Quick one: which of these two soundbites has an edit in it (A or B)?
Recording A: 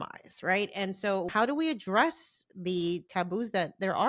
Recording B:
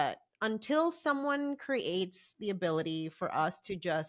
A